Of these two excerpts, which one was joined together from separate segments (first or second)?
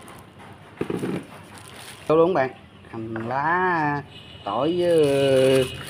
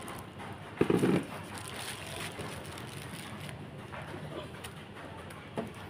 first